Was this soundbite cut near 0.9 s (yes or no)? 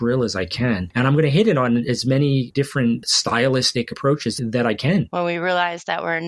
yes